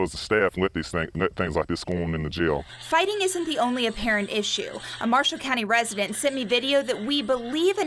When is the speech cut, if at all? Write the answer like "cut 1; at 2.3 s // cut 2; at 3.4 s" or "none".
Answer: none